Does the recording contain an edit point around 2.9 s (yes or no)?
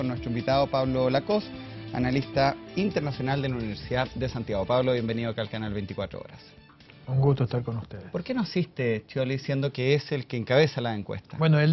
no